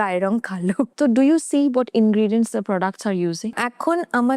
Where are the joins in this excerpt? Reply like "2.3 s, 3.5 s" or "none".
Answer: 0.9 s, 3.5 s